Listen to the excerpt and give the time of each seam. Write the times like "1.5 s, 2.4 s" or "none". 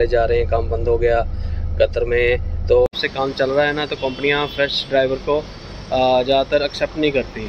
2.9 s